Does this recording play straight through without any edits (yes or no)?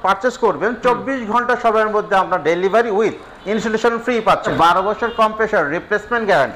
no